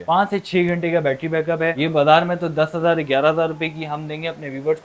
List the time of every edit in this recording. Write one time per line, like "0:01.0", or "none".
none

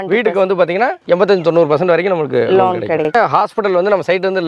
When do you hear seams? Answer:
0:03.1

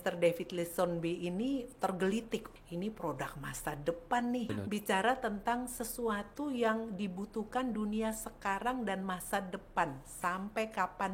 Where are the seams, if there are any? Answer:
0:02.5
0:04.5

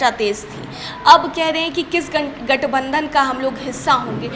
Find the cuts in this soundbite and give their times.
none

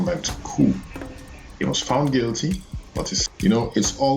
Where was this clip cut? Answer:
0:03.2

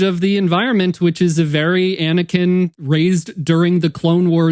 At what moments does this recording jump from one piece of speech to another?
0:02.7

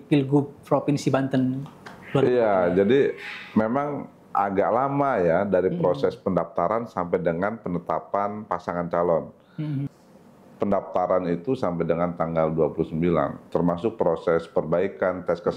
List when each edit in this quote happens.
0:09.9

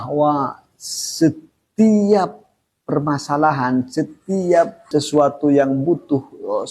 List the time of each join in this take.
0:04.9

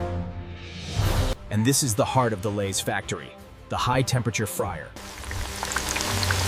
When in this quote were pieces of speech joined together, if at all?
0:01.3
0:05.0

